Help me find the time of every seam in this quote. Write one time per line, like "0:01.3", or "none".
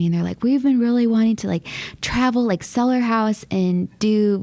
none